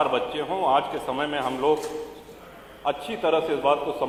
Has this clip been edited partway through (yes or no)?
no